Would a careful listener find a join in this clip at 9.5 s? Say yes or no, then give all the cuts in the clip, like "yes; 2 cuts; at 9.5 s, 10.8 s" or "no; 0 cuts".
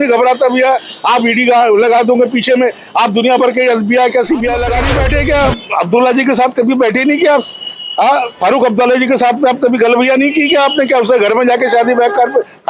no; 1 cut; at 4.9 s